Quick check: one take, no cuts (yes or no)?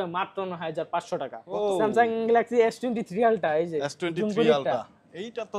no